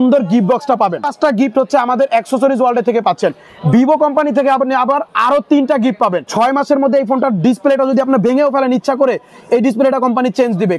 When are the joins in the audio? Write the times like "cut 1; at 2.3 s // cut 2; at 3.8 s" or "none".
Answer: cut 1; at 1.1 s // cut 2; at 6.2 s